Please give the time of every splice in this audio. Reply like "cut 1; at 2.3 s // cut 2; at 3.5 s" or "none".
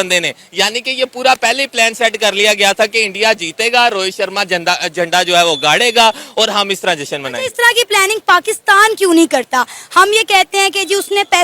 none